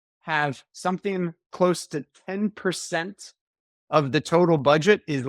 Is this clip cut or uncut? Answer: uncut